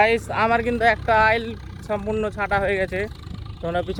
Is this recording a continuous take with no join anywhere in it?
yes; 0 cuts

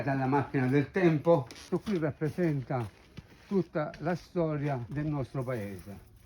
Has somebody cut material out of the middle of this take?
yes; 2 cuts; at 1.6 s, 4.9 s

